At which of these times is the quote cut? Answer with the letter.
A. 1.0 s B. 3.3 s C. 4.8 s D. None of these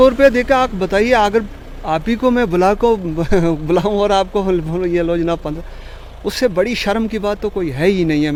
D